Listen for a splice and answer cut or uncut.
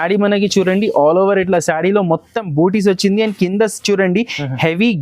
uncut